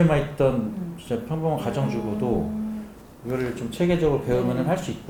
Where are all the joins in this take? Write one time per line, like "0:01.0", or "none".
none